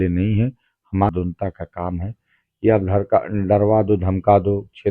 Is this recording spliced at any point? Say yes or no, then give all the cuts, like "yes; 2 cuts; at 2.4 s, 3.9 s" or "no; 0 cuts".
yes; 1 cut; at 1.1 s